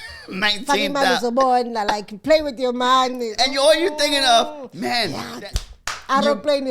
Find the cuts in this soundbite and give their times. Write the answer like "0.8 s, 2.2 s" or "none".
5.3 s